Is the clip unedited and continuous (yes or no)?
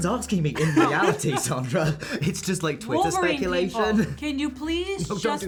yes